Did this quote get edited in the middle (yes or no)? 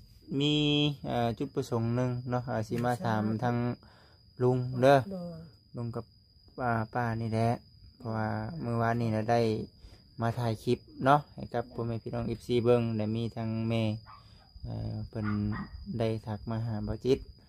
no